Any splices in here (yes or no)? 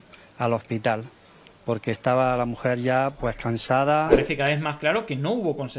yes